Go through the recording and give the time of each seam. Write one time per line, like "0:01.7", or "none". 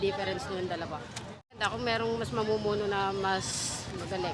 0:01.6